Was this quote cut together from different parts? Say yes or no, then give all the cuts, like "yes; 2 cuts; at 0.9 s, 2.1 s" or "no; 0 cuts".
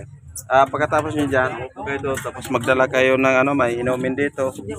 no; 0 cuts